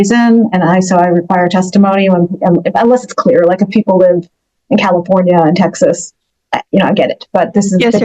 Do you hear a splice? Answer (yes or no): no